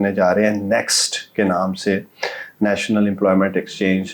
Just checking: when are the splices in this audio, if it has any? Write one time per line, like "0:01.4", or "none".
none